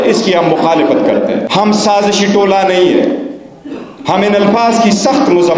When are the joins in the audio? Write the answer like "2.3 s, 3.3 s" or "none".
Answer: 1.5 s